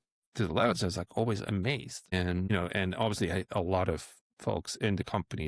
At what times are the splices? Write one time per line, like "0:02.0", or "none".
0:02.3